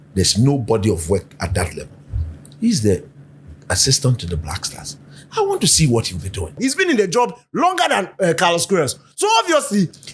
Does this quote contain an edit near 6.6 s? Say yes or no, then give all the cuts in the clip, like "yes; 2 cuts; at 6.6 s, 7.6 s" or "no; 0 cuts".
yes; 1 cut; at 6.6 s